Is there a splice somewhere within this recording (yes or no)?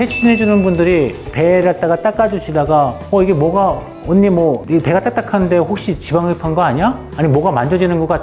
no